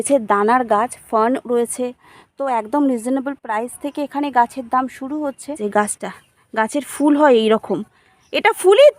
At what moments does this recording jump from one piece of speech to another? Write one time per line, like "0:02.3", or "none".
0:05.6